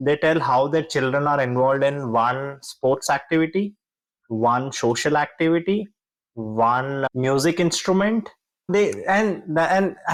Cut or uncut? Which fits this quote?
uncut